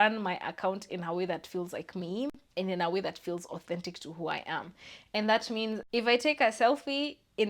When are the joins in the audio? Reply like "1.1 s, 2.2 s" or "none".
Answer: 5.8 s